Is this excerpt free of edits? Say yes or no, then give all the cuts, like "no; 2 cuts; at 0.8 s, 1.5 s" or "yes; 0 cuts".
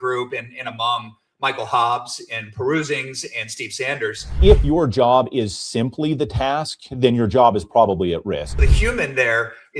no; 2 cuts; at 4.4 s, 8.6 s